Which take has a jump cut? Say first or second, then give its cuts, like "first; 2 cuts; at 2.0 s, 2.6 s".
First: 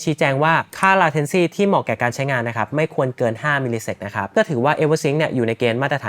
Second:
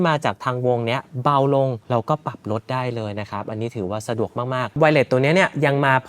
second; 1 cut; at 4.8 s